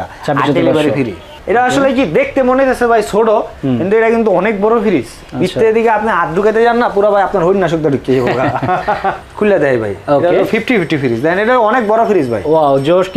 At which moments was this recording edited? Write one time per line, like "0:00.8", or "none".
0:01.3
0:09.2

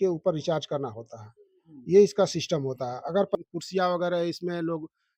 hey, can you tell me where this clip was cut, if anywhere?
0:03.3

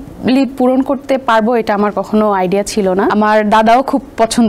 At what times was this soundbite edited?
0:03.1

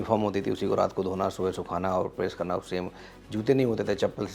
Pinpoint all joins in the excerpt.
none

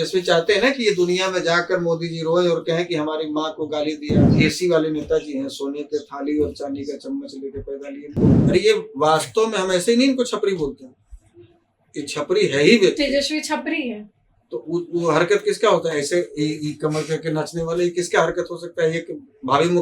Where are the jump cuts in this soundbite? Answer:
0:04.3
0:08.3

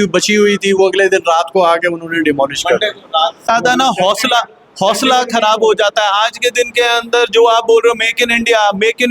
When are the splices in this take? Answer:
0:03.5

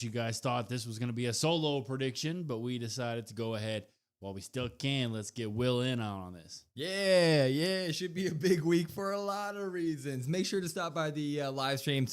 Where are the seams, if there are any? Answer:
0:03.1

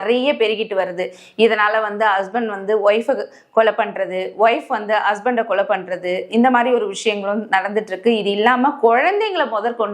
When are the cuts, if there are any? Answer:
none

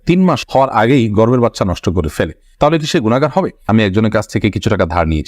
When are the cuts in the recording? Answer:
0:03.7

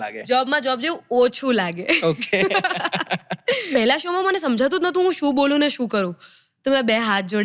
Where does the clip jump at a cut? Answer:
0:03.7

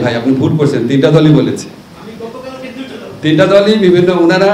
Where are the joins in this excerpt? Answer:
none

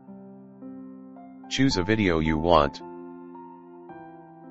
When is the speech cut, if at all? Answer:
0:01.1
0:02.7

